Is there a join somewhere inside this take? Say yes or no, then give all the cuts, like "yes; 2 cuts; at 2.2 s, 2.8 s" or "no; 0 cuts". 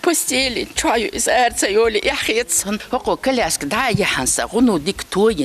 yes; 1 cut; at 2.8 s